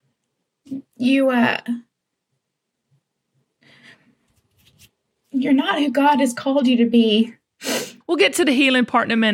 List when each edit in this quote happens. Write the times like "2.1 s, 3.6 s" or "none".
7.9 s